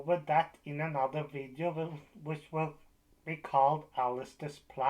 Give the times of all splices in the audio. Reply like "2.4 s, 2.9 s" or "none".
none